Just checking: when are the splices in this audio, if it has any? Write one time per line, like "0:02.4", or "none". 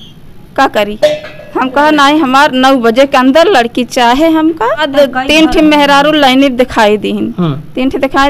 0:04.9